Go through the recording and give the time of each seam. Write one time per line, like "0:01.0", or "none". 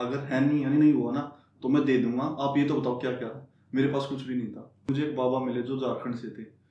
0:04.9